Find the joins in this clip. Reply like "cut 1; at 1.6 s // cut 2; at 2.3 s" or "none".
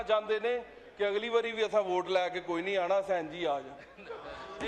none